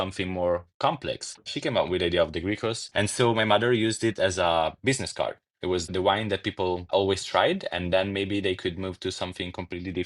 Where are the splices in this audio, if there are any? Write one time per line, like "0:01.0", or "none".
0:01.5
0:02.8
0:05.9